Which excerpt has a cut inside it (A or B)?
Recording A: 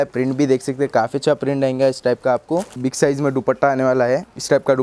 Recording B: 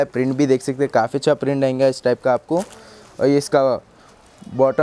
A